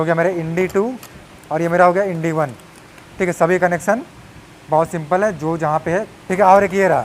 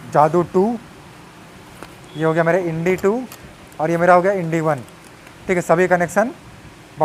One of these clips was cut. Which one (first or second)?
first